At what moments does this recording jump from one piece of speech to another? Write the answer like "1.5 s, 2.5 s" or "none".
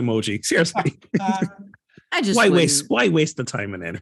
none